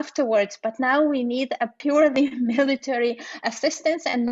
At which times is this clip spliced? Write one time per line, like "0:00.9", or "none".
0:01.7